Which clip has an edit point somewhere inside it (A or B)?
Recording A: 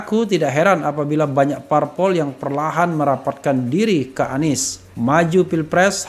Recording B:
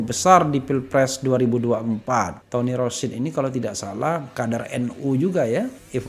B